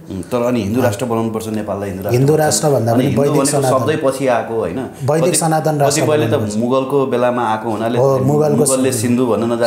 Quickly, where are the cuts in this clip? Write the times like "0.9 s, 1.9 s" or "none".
none